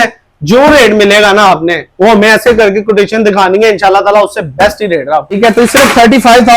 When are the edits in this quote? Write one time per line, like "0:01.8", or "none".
0:05.4